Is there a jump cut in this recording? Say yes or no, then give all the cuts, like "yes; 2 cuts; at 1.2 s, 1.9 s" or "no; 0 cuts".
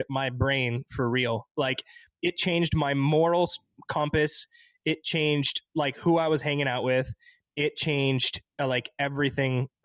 no; 0 cuts